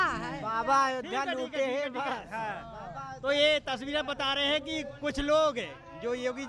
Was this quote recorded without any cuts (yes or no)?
yes